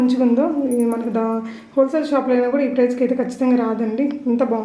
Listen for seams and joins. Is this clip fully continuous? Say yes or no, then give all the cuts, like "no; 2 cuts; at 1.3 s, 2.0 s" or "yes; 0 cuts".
yes; 0 cuts